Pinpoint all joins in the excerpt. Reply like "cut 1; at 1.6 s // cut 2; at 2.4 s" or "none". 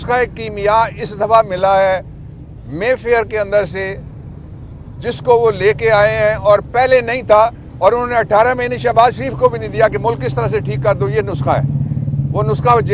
none